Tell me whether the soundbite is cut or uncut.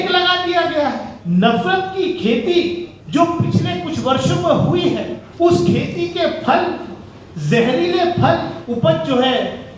cut